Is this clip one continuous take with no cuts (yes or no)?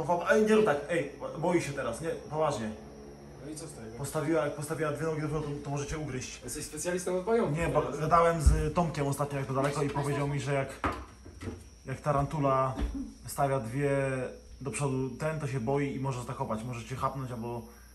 yes